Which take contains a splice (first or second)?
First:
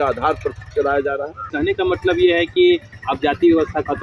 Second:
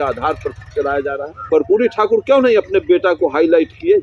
second